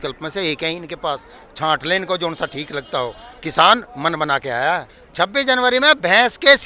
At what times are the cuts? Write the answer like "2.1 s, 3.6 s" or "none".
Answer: 4.8 s

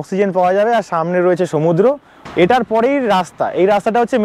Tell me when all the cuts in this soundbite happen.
2.1 s

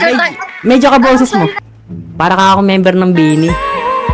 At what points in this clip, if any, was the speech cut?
1.7 s

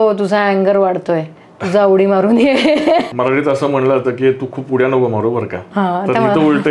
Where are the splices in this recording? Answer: 3.1 s

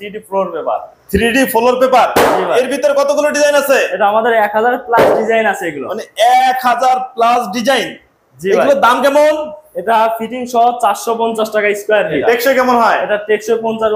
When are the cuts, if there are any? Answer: 12.2 s

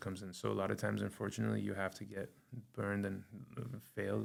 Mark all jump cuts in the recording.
none

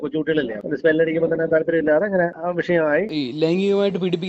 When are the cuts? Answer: 3.1 s

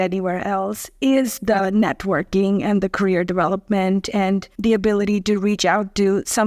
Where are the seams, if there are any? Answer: 4.5 s

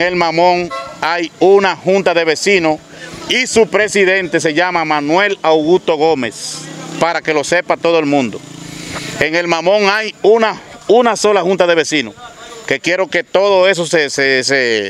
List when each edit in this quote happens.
none

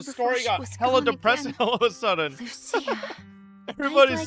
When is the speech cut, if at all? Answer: none

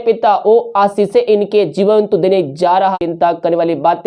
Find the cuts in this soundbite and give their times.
2.9 s

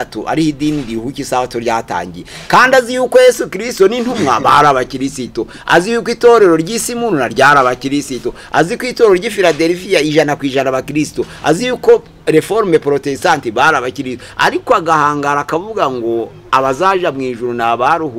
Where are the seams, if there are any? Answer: none

